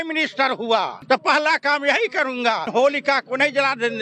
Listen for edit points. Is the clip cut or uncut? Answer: cut